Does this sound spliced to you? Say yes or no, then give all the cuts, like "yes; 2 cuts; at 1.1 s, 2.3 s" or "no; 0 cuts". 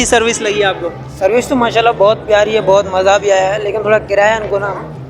no; 0 cuts